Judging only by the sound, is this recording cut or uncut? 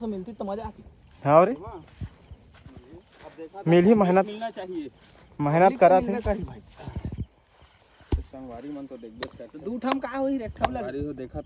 uncut